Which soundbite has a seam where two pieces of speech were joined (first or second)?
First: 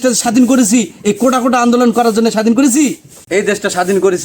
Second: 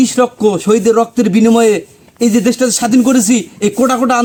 first